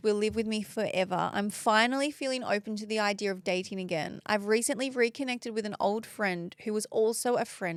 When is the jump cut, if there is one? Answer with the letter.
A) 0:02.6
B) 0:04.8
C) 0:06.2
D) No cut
D